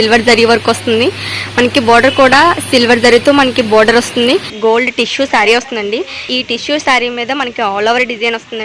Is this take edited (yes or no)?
yes